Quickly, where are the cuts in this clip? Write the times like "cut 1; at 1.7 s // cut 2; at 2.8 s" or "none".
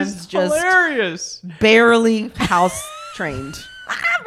none

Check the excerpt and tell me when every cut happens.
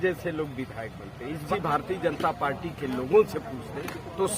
cut 1; at 1.4 s

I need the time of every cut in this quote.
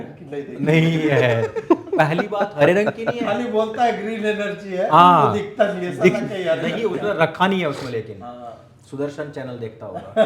none

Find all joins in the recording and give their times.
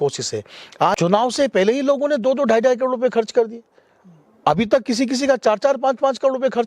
cut 1; at 1.0 s

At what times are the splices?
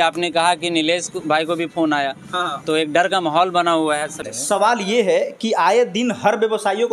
cut 1; at 4.2 s

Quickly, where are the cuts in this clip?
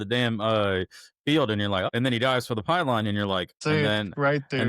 cut 1; at 1.9 s // cut 2; at 3.6 s

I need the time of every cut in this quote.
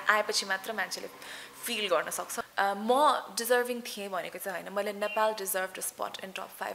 cut 1; at 2.4 s

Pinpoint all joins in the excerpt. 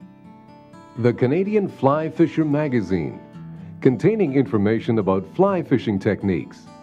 cut 1; at 0.9 s

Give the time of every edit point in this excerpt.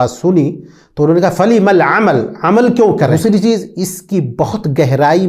cut 1; at 3.1 s

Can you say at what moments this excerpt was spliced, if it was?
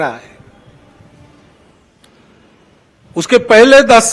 none

